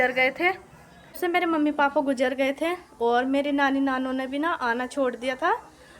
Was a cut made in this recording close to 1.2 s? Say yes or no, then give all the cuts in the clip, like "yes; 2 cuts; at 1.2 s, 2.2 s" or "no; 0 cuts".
yes; 1 cut; at 1.2 s